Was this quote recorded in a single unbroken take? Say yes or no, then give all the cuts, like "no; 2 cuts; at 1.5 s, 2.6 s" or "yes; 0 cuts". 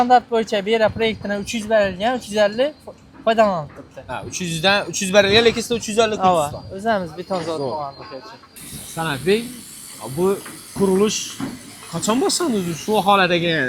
yes; 0 cuts